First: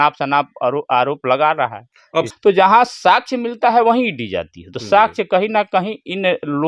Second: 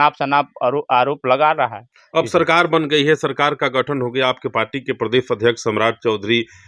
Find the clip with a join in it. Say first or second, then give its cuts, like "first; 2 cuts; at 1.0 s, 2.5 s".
first; 1 cut; at 2.3 s